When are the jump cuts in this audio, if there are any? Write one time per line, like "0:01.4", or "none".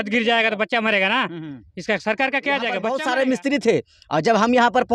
0:02.8

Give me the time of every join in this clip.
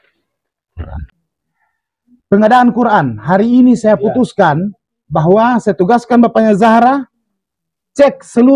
0:01.0

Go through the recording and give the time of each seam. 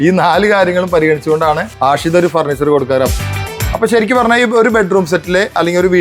0:01.7
0:03.2

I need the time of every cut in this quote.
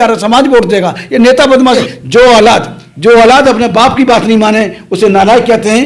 0:01.7

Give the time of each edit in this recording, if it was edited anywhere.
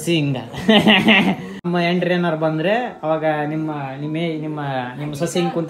0:01.6

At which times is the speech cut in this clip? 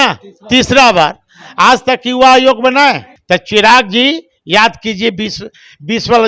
0:03.1

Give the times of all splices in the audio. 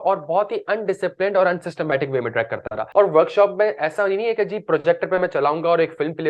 0:02.8

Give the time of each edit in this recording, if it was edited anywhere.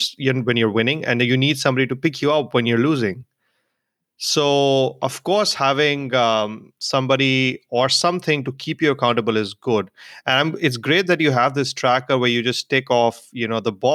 none

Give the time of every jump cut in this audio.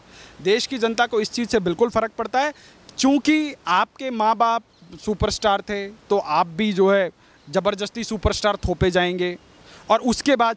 none

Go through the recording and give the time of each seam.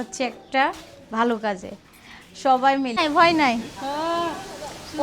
0:03.0

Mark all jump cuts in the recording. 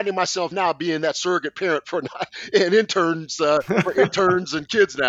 none

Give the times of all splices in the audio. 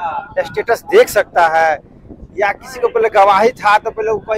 none

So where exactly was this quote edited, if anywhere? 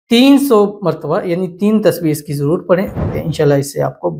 0:03.0

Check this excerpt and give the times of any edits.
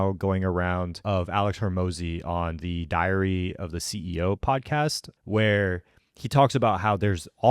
0:01.0
0:05.1

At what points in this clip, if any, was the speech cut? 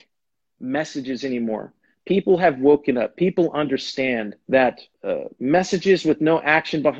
0:04.3
0:04.9

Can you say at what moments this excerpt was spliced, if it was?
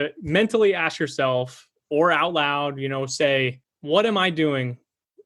0:03.7

